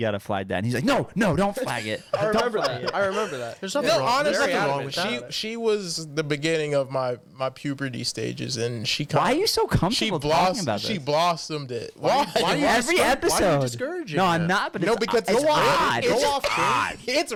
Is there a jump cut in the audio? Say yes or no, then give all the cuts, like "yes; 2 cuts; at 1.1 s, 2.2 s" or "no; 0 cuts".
no; 0 cuts